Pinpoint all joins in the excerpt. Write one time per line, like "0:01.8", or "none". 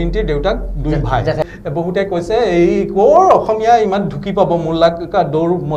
0:01.4